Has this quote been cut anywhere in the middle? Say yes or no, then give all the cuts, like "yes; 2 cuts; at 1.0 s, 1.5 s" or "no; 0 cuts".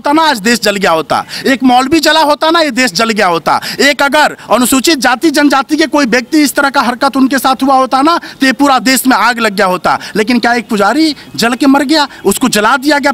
no; 0 cuts